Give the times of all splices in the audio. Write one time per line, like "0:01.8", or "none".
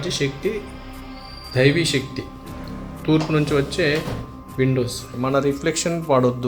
0:05.4